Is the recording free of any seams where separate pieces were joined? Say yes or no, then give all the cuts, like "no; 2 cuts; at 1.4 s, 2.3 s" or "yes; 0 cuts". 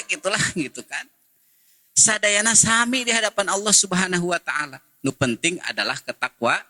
yes; 0 cuts